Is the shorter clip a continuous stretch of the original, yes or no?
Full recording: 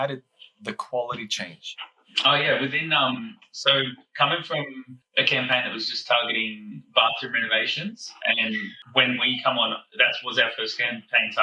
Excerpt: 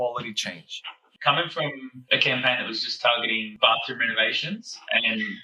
no